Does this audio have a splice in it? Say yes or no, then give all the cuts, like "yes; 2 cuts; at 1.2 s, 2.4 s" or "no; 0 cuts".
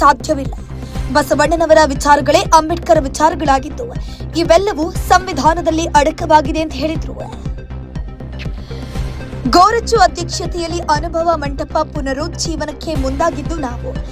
yes; 2 cuts; at 7.2 s, 9.4 s